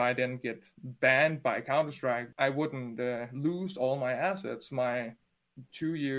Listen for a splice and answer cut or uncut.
cut